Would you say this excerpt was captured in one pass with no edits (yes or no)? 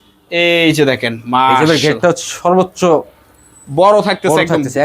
yes